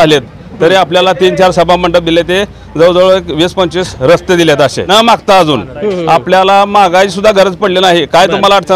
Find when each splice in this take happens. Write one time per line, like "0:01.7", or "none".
0:03.9
0:04.9